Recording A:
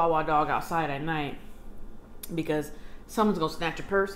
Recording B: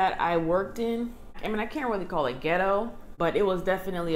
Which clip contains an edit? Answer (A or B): B